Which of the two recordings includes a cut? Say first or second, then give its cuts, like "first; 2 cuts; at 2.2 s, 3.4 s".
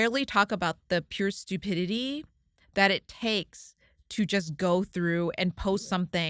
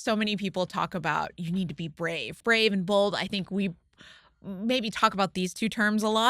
second; 1 cut; at 2.3 s